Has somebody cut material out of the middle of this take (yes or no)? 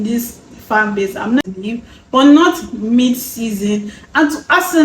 yes